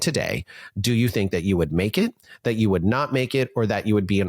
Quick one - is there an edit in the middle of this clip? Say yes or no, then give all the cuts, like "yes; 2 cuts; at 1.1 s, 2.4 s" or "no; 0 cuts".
no; 0 cuts